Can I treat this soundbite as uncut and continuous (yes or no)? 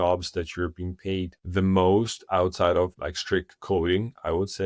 no